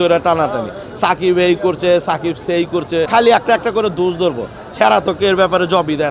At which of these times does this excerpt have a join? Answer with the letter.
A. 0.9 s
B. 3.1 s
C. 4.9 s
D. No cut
B